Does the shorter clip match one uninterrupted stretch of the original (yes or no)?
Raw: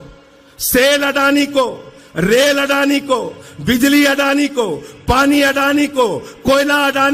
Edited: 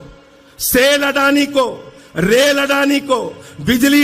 yes